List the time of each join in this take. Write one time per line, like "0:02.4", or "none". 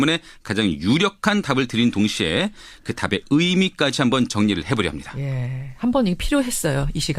none